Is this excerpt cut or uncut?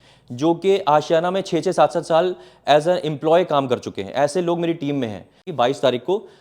cut